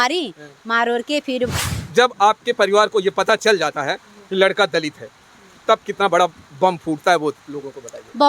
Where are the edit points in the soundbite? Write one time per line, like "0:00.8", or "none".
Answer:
0:01.7